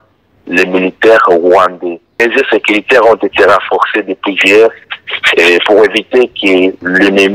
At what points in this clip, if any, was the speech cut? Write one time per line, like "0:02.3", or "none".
0:02.1